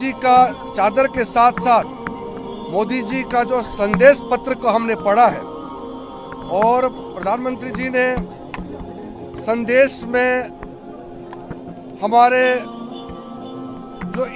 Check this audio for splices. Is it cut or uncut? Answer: uncut